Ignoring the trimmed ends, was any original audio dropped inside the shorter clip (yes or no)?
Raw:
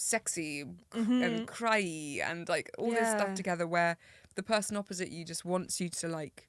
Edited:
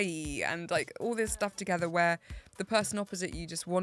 no